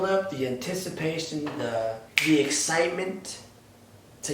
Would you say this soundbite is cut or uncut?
cut